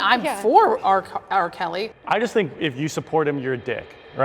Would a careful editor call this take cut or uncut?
cut